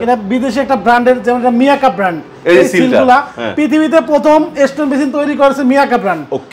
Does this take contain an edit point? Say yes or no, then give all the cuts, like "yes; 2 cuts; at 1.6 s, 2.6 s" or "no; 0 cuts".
no; 0 cuts